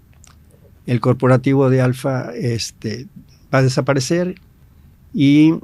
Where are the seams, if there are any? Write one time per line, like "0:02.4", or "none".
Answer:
none